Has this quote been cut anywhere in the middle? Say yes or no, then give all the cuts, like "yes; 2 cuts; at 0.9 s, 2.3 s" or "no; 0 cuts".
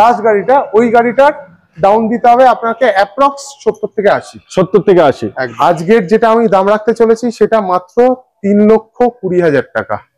yes; 1 cut; at 5.4 s